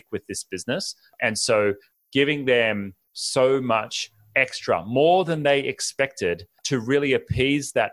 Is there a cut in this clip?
yes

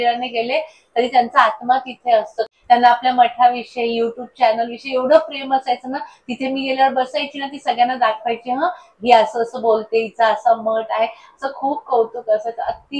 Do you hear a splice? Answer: yes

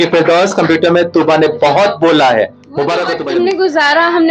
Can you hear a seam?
yes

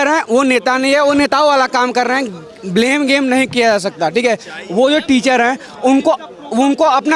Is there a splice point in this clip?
no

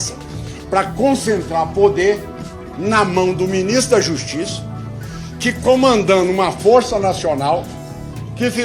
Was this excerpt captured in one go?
yes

